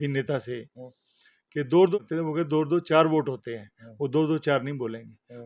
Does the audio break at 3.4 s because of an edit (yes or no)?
no